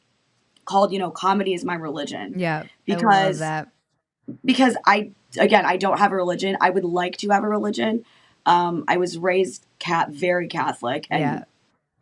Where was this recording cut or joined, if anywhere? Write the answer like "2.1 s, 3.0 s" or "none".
none